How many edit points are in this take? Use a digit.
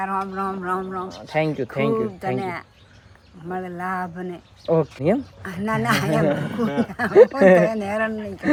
0